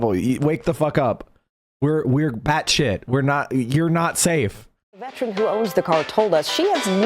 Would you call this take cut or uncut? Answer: cut